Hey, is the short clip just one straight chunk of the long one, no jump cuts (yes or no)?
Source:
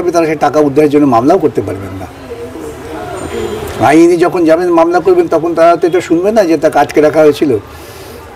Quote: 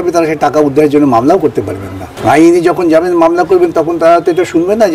no